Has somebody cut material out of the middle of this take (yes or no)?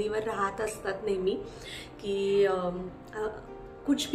no